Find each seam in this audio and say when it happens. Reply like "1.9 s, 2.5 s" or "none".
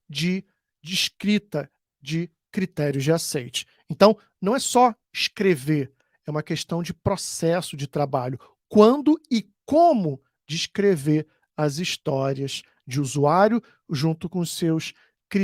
none